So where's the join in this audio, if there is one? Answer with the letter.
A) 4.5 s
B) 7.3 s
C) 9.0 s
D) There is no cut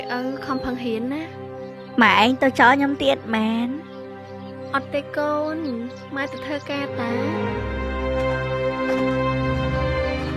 B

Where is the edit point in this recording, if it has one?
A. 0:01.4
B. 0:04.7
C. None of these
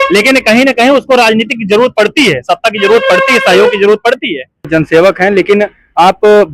B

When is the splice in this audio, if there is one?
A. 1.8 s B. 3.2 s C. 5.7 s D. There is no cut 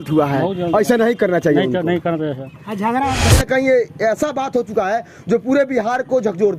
B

